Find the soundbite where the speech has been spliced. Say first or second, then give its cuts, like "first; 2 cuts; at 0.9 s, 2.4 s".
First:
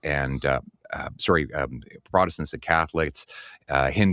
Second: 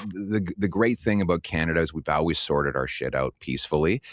first; 1 cut; at 3.1 s